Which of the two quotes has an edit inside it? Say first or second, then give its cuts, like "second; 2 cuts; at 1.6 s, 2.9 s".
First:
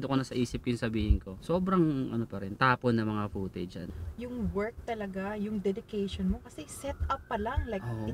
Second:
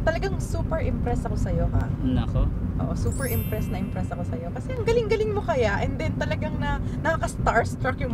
first; 2 cuts; at 1.3 s, 3.9 s